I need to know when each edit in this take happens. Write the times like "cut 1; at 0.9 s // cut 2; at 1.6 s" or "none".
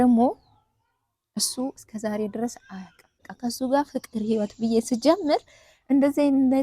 cut 1; at 3.3 s